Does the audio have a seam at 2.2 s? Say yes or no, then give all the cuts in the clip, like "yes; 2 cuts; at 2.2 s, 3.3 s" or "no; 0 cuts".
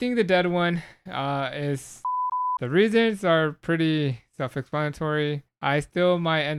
yes; 2 cuts; at 2.2 s, 5.5 s